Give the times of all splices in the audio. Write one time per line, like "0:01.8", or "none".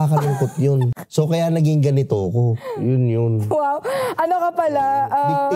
0:01.0